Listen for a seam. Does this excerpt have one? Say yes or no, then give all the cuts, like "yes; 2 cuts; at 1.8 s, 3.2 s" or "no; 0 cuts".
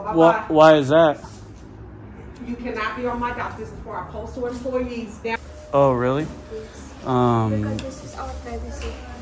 yes; 1 cut; at 5.4 s